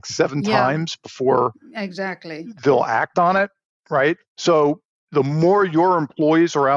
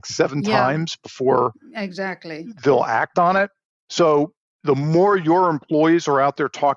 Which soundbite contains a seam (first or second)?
second